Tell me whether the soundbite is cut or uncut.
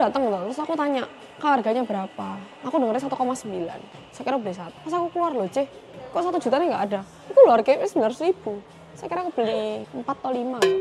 cut